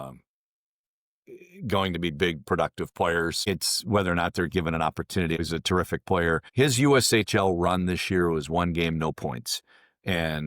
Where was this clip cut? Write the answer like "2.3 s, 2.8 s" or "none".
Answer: 3.5 s, 5.4 s, 6.5 s

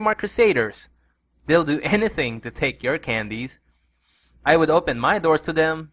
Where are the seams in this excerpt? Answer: 3.4 s

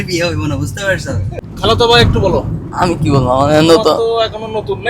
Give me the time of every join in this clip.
1.3 s

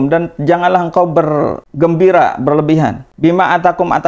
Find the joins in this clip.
1.6 s, 3.0 s

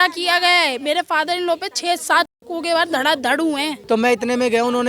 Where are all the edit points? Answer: 3.7 s

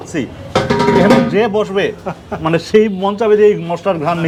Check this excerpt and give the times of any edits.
none

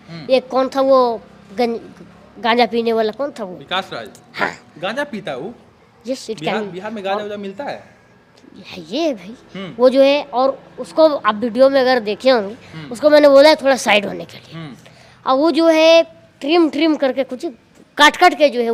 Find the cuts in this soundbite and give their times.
none

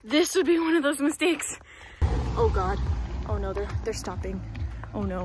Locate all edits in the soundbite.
2.0 s

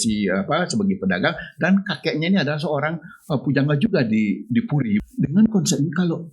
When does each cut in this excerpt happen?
5.0 s

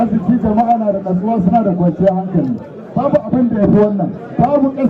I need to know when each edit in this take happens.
none

